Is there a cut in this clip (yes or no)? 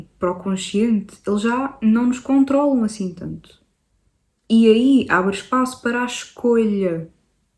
no